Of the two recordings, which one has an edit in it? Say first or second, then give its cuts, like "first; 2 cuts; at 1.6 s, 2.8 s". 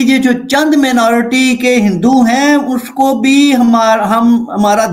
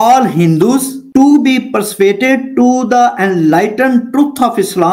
second; 1 cut; at 1.0 s